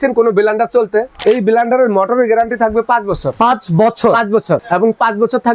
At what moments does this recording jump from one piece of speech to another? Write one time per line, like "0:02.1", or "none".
0:01.1
0:03.3
0:04.6